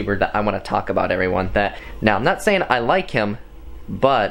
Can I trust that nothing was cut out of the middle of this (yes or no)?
no